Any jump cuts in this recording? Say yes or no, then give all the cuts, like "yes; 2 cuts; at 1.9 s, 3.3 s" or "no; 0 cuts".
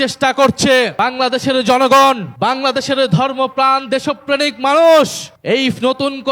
yes; 3 cuts; at 0.9 s, 2.3 s, 5.3 s